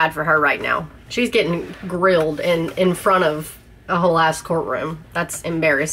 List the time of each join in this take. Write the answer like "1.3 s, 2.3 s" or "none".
1.0 s